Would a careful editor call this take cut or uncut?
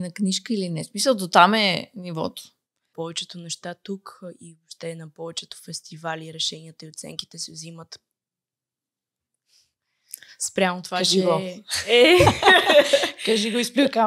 cut